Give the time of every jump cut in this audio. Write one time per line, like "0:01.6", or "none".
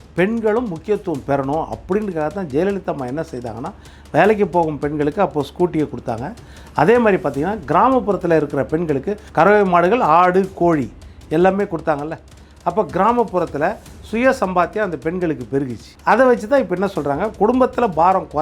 0:09.2
0:15.8

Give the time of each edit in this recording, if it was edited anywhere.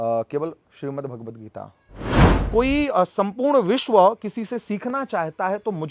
0:02.3

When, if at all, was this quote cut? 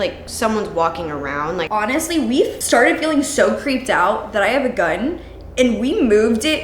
0:01.6
0:02.6

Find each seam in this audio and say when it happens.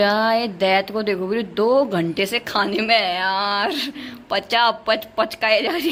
none

